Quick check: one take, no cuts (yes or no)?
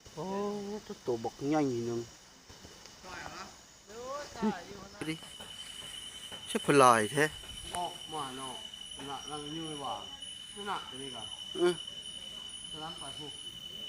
no